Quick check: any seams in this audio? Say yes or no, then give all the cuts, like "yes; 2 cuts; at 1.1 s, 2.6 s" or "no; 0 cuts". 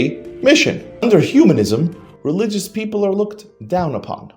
yes; 1 cut; at 1.0 s